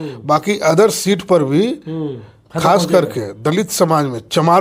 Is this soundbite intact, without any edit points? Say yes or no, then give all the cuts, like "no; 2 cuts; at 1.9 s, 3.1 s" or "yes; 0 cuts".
yes; 0 cuts